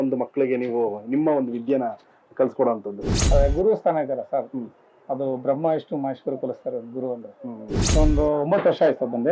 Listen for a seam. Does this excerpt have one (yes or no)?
yes